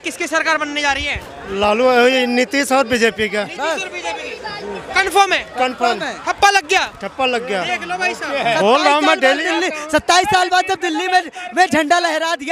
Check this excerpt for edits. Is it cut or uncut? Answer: uncut